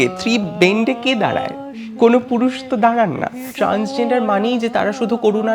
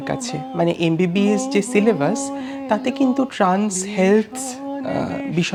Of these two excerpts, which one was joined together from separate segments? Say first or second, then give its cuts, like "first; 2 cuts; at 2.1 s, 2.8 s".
first; 1 cut; at 3.4 s